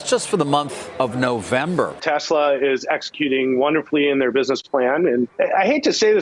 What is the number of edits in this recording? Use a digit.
2